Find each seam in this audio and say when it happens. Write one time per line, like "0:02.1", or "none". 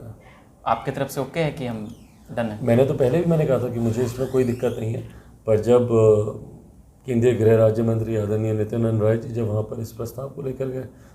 none